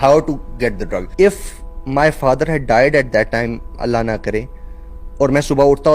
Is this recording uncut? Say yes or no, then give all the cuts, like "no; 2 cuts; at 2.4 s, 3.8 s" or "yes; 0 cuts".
no; 1 cut; at 1.0 s